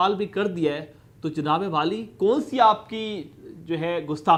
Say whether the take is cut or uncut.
uncut